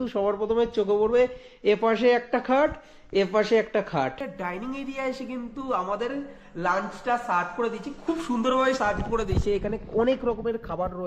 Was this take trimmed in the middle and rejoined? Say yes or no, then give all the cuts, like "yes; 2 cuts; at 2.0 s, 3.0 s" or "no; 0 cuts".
yes; 1 cut; at 4.3 s